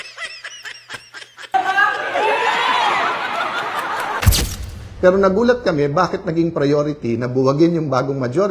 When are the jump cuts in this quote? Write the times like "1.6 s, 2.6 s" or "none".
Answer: 4.4 s